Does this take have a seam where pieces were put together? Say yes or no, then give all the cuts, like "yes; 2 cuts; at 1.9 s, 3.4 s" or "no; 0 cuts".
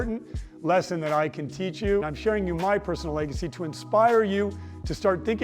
yes; 1 cut; at 2.1 s